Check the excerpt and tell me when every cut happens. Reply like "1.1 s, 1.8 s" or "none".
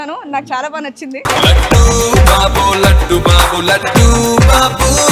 none